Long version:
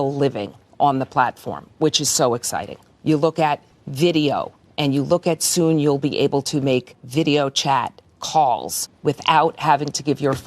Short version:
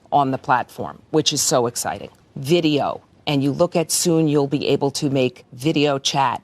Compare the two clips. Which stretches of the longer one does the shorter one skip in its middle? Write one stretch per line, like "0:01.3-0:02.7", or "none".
0:02.9-0:03.7